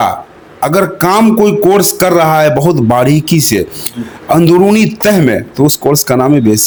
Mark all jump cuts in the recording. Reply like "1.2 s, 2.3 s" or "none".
none